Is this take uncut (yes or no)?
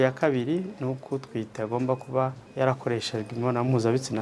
no